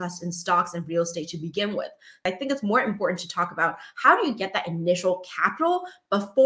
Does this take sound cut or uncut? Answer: cut